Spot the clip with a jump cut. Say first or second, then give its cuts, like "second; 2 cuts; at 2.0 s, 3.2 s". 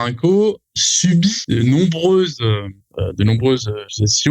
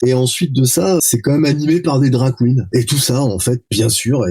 second; 2 cuts; at 1.0 s, 2.6 s